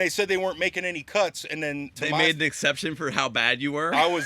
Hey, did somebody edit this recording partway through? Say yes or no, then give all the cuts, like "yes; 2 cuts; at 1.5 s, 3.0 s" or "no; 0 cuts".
yes; 1 cut; at 2.0 s